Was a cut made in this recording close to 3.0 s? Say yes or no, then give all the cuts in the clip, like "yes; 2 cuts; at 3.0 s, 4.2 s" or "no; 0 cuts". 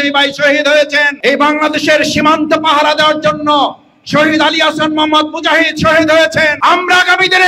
no; 2 cuts; at 1.1 s, 6.5 s